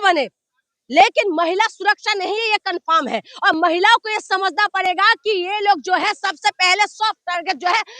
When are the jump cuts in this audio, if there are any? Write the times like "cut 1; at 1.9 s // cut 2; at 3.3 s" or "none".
none